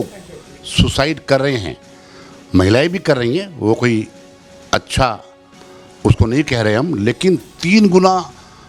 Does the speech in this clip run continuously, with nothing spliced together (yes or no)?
yes